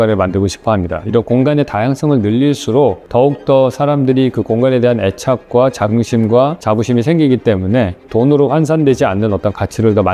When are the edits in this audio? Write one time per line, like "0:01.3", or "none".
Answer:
0:03.0
0:06.6